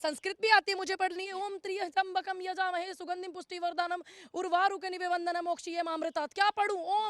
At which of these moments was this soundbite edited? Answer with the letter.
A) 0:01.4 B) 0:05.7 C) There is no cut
A